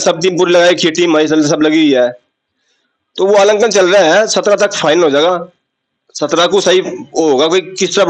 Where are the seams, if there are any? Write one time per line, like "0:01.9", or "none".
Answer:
none